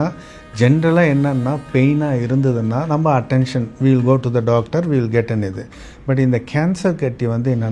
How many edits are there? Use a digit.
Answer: 0